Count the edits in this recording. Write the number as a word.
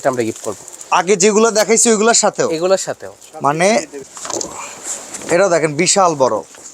one